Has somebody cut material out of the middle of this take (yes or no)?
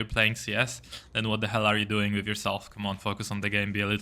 no